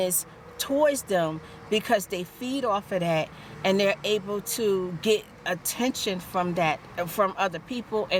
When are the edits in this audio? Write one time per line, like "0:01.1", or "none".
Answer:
none